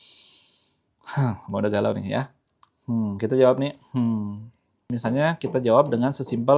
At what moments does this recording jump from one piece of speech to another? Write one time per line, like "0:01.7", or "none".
0:04.9